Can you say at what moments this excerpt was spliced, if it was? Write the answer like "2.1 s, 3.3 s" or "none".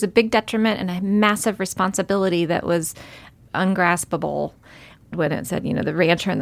3.3 s, 5.1 s